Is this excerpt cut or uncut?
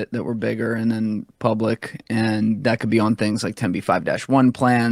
uncut